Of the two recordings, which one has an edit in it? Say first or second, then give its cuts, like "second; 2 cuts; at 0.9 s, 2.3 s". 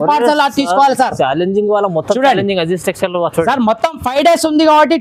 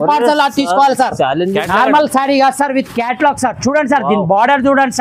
second; 1 cut; at 1.6 s